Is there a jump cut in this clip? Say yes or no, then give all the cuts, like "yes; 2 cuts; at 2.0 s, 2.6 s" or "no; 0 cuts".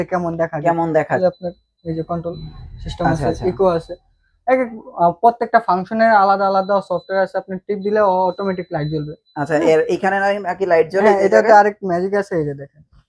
yes; 1 cut; at 1.2 s